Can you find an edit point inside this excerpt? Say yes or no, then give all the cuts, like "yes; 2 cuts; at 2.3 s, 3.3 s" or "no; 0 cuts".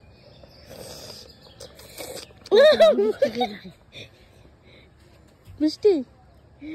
no; 0 cuts